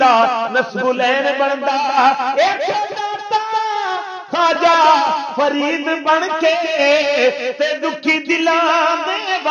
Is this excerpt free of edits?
yes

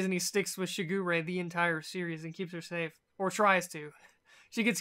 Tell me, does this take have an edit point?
yes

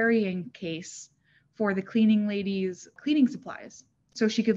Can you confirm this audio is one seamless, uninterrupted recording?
no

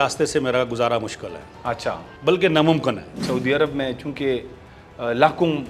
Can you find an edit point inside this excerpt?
yes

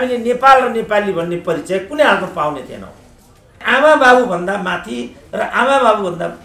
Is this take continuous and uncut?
no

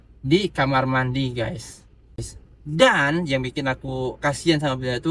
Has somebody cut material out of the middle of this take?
yes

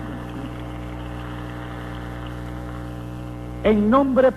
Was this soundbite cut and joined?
no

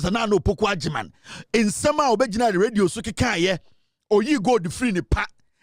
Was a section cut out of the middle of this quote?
no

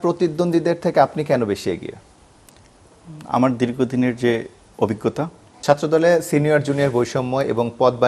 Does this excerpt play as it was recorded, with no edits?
no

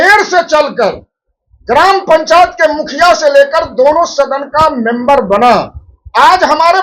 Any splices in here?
no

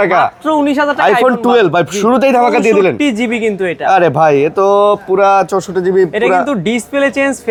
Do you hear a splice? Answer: no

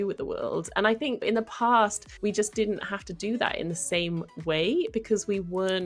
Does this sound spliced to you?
yes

